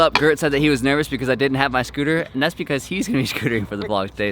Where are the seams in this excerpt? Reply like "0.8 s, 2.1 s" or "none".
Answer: none